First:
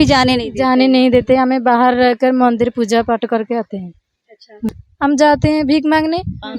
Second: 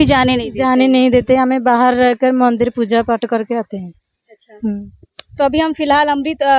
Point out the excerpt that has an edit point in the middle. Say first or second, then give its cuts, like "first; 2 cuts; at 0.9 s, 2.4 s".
first; 1 cut; at 4.8 s